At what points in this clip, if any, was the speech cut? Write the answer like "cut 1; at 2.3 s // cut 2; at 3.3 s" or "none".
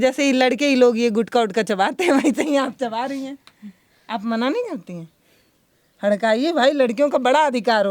none